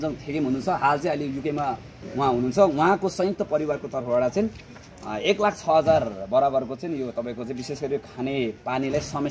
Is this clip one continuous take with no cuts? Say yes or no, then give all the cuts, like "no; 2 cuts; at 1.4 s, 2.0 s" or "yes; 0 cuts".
yes; 0 cuts